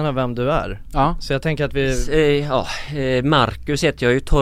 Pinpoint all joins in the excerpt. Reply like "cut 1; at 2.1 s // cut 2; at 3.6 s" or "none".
cut 1; at 2.0 s